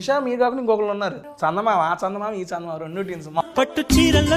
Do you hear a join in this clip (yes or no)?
yes